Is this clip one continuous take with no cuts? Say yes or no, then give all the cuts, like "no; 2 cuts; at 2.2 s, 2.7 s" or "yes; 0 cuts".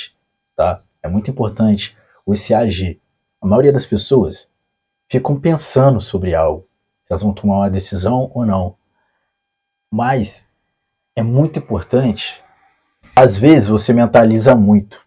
no; 1 cut; at 13.2 s